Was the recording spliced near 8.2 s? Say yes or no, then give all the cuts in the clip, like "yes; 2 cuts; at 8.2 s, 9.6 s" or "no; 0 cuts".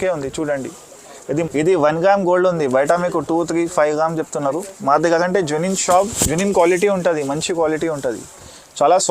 no; 1 cut; at 1.2 s